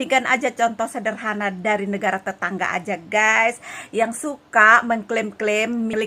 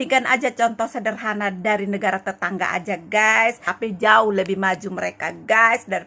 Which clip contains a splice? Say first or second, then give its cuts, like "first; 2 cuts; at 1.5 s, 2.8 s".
second; 1 cut; at 3.7 s